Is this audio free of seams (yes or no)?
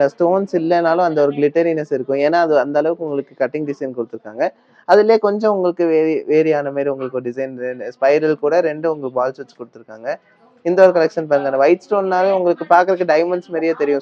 yes